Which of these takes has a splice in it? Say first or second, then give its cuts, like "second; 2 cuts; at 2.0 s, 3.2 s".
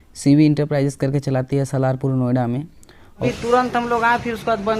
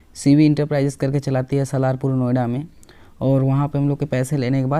first; 1 cut; at 3.2 s